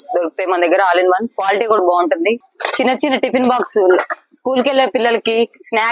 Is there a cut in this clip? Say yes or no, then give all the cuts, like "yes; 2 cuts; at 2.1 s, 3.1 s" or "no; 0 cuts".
yes; 1 cut; at 2.5 s